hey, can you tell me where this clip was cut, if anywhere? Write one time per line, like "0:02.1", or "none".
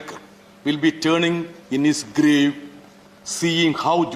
none

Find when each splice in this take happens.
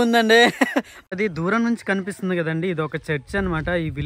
0:01.0

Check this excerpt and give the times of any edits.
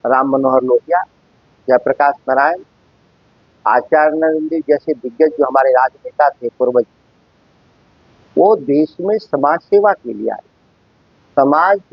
none

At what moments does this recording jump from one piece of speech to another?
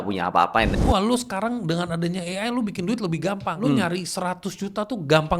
0:00.8
0:03.5

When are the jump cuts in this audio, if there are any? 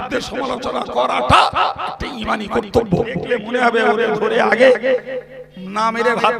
0:03.4

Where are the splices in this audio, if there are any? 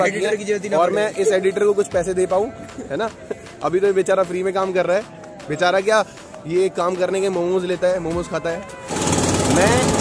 0:08.8

